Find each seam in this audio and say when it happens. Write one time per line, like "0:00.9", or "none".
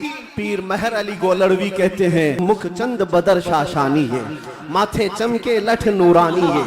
0:02.4